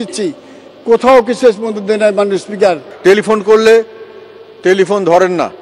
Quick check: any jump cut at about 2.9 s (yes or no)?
yes